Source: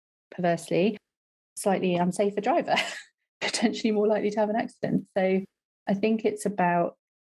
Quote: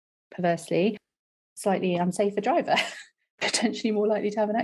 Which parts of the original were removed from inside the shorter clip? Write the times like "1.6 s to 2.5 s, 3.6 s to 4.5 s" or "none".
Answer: none